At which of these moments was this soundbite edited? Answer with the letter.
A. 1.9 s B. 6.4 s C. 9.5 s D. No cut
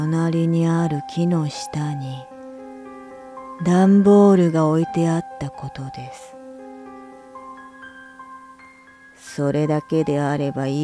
A